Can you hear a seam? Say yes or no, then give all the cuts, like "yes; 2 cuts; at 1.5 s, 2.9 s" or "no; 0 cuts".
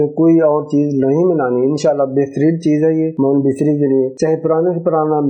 yes; 2 cuts; at 3.1 s, 4.1 s